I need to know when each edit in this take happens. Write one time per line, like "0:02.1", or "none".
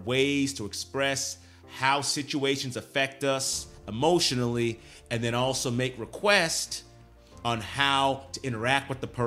none